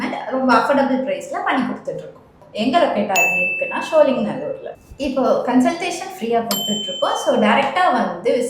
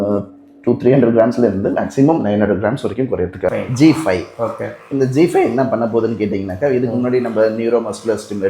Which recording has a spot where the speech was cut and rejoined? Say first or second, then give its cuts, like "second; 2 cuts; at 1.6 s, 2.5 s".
second; 1 cut; at 3.5 s